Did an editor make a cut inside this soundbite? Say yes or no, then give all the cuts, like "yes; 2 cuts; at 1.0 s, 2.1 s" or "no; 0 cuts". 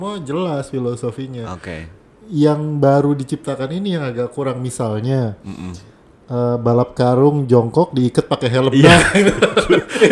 no; 0 cuts